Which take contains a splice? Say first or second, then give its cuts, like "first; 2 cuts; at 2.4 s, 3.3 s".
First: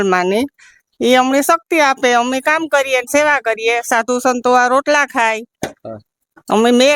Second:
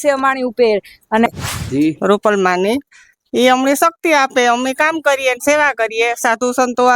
second; 1 cut; at 1.3 s